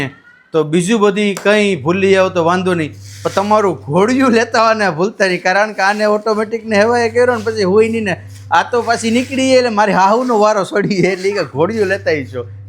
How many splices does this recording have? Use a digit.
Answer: 0